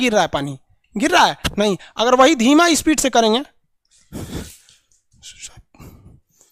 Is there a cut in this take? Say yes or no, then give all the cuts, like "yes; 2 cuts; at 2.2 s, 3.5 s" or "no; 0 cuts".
no; 0 cuts